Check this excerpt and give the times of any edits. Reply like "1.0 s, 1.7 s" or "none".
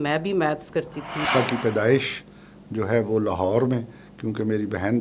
1.3 s